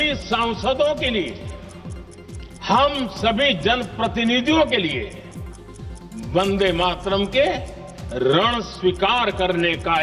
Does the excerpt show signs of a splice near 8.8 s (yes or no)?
no